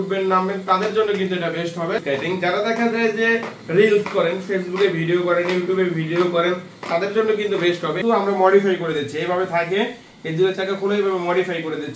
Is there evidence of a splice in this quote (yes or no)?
yes